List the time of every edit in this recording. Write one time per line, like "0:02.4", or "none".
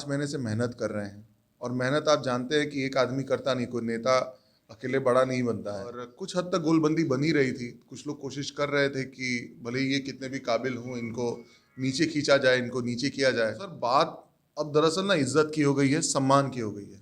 0:06.1
0:13.7